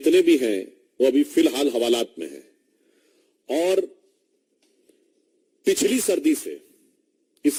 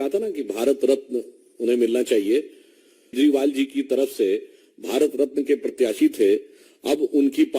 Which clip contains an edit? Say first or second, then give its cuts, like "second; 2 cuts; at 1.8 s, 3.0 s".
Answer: second; 1 cut; at 3.2 s